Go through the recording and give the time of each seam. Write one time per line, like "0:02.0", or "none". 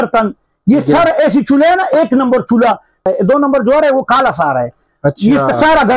0:03.0